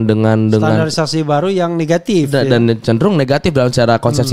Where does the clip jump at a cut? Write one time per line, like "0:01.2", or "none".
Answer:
none